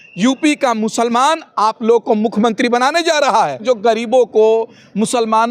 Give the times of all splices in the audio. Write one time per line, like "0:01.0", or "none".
0:03.6